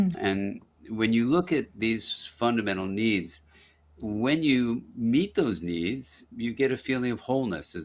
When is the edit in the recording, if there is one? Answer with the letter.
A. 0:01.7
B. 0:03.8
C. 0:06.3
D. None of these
D